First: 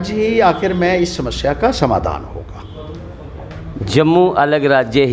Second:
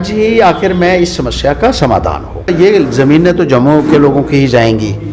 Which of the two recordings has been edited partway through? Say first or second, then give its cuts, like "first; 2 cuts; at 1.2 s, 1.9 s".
second; 1 cut; at 2.5 s